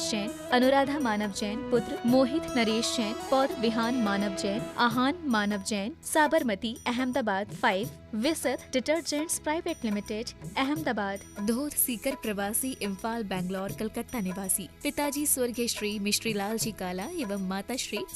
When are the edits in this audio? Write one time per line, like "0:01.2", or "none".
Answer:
0:03.5